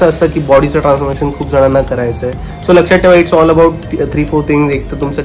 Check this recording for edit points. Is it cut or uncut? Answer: uncut